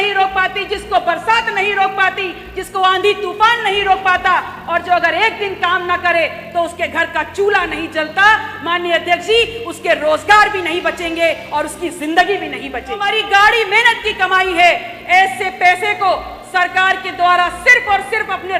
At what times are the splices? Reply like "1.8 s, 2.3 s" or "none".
13.0 s